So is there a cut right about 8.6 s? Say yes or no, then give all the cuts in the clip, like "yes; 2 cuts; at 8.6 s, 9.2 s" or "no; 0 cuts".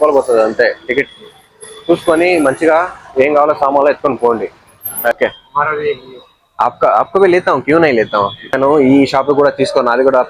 yes; 2 cuts; at 5.1 s, 8.6 s